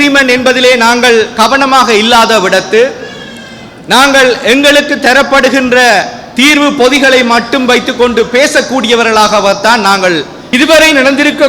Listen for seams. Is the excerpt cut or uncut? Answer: cut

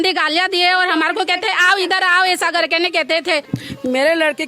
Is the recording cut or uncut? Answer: cut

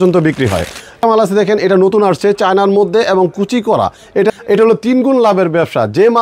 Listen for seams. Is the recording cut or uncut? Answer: cut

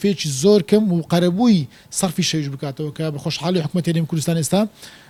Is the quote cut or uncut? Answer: uncut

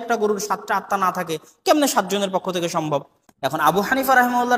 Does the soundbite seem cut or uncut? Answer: cut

